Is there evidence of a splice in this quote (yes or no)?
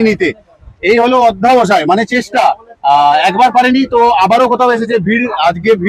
no